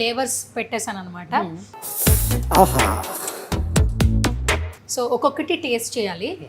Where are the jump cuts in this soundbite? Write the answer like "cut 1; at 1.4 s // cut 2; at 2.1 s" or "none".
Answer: none